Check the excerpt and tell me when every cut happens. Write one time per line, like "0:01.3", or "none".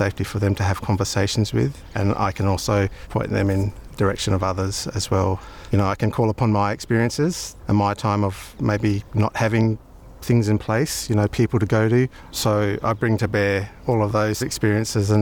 0:01.8
0:03.0
0:05.5
0:07.5
0:08.8
0:12.3
0:14.2